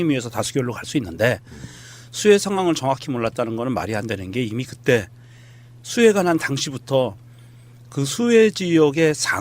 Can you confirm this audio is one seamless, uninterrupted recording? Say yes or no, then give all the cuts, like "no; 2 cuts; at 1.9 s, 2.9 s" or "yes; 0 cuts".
no; 1 cut; at 3.2 s